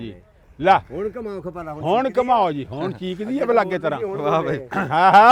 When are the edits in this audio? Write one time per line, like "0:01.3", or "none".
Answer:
none